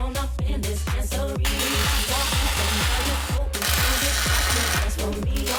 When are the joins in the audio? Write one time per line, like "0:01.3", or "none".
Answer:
none